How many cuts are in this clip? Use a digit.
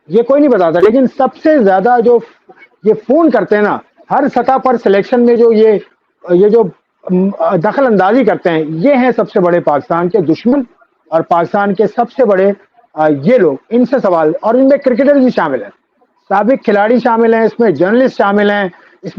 0